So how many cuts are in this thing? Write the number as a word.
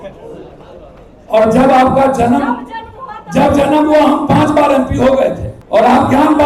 one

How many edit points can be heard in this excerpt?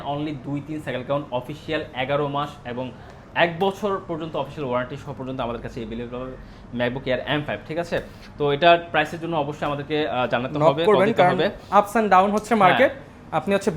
zero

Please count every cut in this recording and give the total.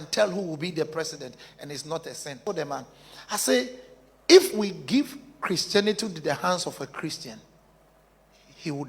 one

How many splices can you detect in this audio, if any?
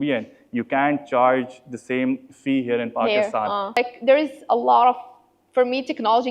one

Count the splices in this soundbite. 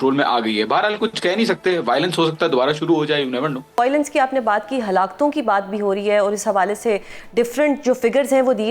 one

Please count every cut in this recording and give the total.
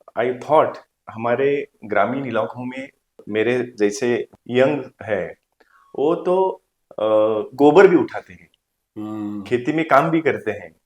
three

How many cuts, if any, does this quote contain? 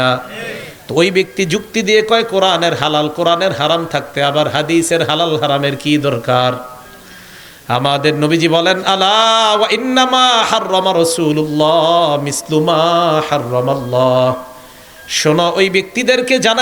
zero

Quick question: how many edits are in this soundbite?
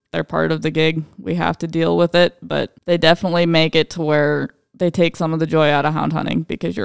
one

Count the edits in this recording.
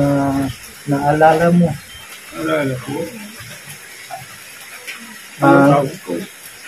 one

